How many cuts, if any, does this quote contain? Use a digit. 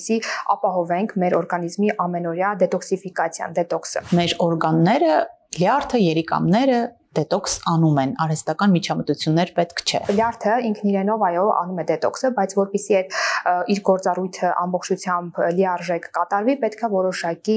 2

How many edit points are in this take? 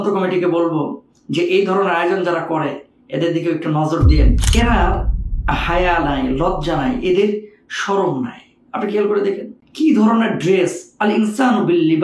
1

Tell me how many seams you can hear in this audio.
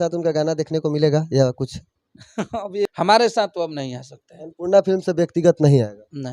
1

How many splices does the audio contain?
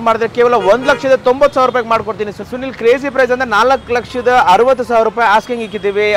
1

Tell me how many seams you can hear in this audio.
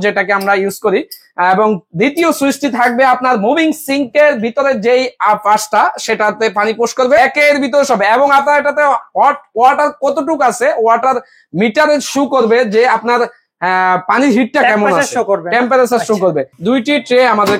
2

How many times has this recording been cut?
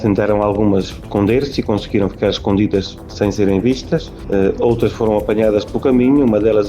3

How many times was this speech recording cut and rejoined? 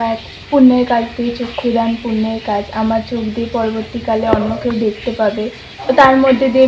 1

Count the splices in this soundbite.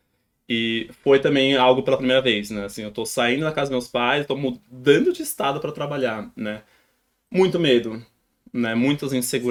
0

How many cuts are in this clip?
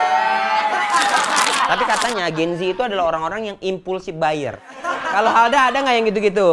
2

